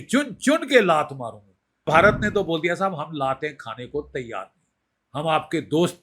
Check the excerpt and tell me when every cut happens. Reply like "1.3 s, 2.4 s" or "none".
1.9 s